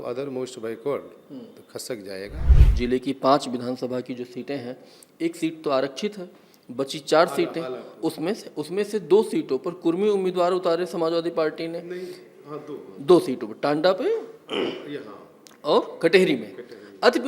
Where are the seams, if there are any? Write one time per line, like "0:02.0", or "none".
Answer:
0:02.6